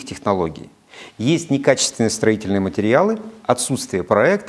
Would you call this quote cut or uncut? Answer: uncut